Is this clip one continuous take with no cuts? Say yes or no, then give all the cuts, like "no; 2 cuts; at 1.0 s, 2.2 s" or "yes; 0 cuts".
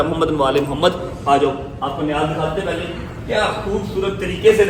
yes; 0 cuts